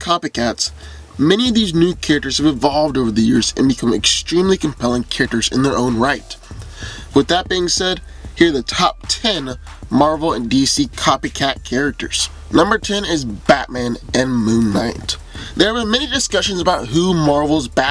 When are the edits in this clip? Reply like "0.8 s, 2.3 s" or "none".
6.2 s